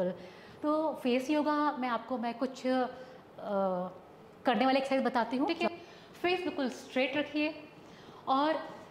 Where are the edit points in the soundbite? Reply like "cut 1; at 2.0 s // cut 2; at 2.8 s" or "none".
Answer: cut 1; at 5.5 s